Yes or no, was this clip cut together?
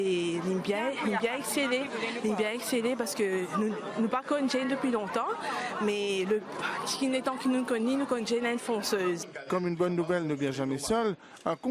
yes